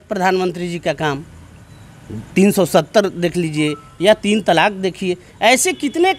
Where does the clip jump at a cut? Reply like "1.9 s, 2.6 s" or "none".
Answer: none